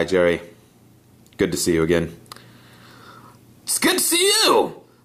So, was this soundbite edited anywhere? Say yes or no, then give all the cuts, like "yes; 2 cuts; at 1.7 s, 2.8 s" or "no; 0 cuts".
yes; 1 cut; at 2.2 s